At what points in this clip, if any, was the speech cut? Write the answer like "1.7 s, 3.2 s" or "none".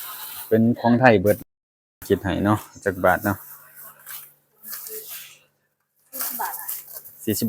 1.4 s